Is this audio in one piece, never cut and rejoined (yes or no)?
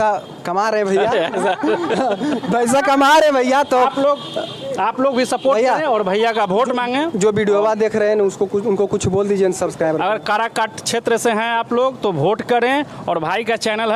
yes